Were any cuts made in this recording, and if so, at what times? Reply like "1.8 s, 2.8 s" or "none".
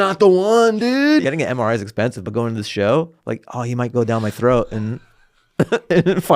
1.2 s